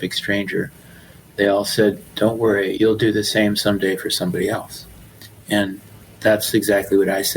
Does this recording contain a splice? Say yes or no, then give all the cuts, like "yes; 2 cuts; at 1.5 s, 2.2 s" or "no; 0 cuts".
yes; 1 cut; at 2.7 s